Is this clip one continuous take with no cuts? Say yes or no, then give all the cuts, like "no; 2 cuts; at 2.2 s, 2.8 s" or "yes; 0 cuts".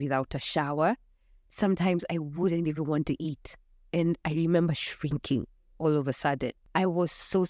no; 1 cut; at 6.6 s